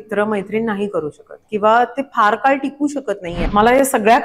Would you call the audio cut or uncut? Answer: cut